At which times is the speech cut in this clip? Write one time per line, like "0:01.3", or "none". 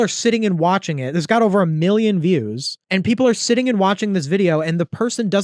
none